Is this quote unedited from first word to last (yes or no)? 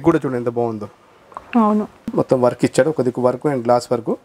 no